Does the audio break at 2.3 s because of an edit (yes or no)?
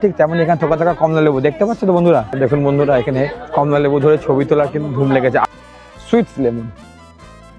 yes